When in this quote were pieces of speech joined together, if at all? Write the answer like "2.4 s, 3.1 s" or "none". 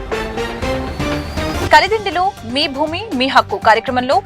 1.0 s